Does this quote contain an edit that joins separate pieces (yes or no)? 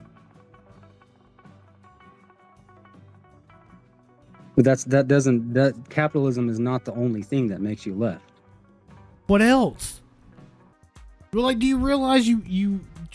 yes